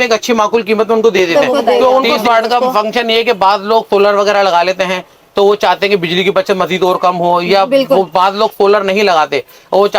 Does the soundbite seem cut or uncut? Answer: cut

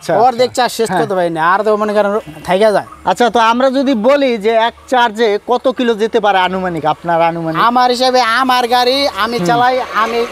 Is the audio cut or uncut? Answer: uncut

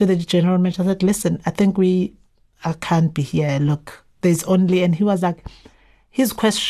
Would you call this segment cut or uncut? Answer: uncut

